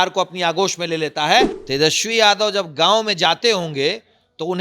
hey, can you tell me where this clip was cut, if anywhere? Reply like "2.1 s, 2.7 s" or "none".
1.6 s